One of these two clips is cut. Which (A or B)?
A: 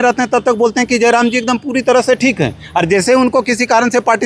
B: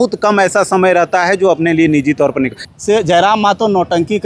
B